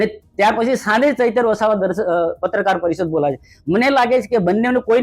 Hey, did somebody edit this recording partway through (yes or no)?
no